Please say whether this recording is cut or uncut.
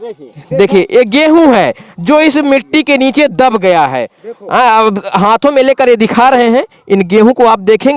uncut